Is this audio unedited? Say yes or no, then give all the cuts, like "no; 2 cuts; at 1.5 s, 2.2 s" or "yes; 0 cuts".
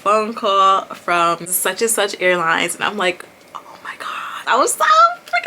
no; 2 cuts; at 1.5 s, 4.4 s